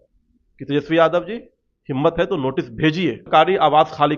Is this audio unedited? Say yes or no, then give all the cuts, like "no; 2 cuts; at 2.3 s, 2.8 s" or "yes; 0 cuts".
no; 1 cut; at 3.2 s